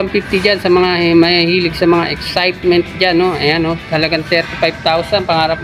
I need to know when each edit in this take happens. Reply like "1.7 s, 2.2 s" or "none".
none